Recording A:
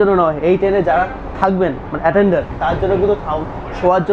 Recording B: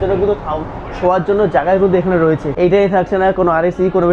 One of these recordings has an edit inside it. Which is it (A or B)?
B